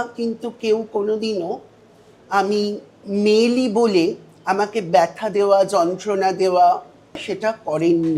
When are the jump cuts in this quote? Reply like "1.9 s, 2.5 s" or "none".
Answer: 2.9 s, 7.3 s